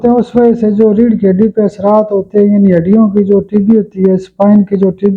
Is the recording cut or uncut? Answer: uncut